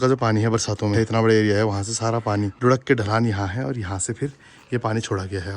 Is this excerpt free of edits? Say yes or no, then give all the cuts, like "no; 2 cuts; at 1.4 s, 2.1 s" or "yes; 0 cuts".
no; 2 cuts; at 0.9 s, 2.5 s